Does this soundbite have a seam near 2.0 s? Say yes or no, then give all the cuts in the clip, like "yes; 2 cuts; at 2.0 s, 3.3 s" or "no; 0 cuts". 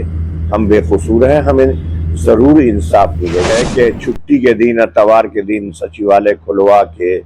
no; 1 cut; at 3.5 s